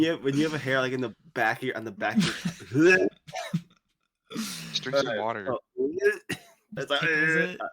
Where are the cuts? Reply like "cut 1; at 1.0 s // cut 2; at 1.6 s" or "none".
cut 1; at 6.6 s